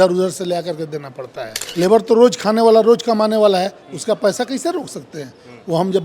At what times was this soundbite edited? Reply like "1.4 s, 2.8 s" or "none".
1.7 s